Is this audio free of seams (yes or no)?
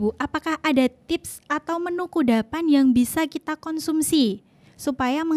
yes